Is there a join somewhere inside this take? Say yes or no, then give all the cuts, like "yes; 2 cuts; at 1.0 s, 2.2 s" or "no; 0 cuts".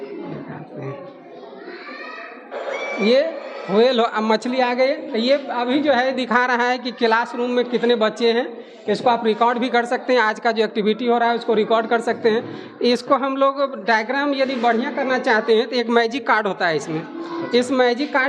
no; 0 cuts